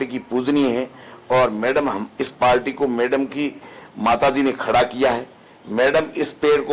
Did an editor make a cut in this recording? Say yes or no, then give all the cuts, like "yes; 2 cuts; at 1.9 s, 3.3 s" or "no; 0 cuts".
no; 0 cuts